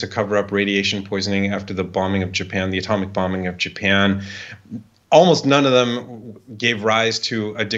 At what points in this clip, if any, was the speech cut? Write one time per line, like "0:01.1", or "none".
none